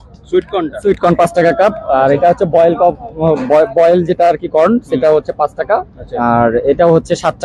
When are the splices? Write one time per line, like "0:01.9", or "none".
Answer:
none